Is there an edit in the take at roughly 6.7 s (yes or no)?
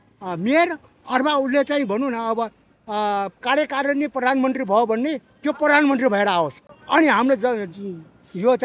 no